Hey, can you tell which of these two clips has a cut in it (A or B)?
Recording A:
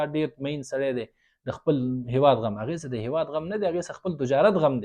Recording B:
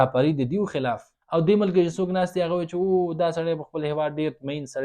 B